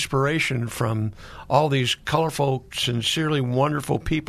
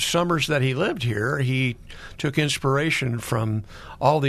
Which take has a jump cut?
first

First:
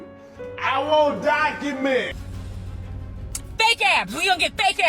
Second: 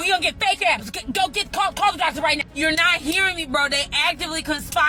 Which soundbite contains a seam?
first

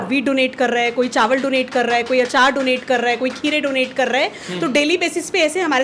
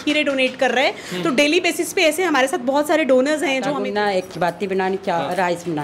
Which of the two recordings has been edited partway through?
second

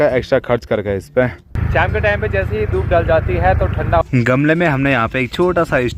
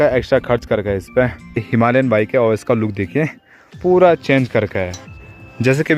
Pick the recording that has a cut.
first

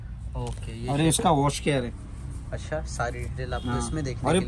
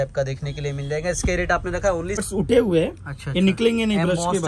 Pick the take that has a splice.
second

